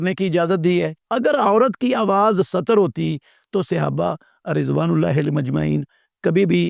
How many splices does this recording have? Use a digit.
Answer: 1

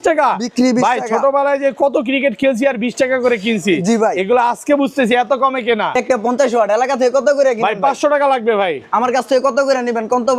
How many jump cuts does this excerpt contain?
1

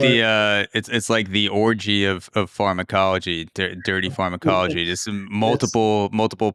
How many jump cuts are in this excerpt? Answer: 0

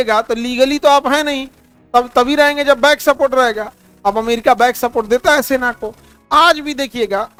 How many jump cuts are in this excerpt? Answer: 0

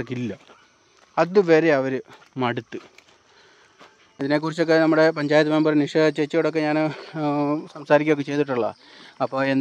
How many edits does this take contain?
1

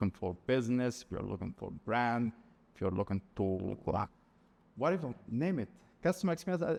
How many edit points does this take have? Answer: 0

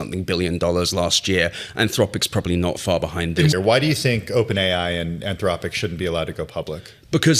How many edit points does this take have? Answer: 1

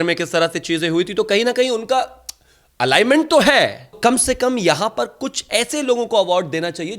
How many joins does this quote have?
1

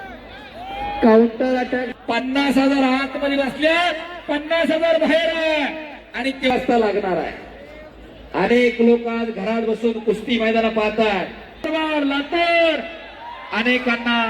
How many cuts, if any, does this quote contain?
3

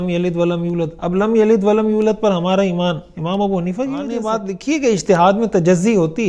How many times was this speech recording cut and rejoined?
1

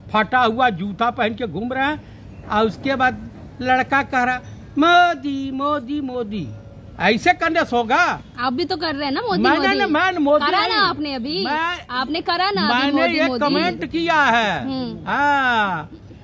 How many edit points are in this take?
0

